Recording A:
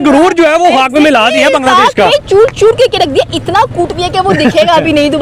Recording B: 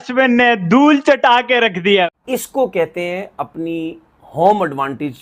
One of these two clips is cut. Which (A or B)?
B